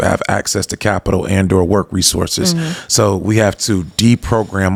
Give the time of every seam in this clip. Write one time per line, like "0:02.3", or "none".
none